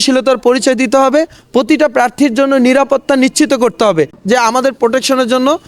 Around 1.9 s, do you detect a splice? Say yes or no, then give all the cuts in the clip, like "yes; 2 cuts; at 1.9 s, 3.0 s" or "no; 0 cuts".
no; 1 cut; at 4.2 s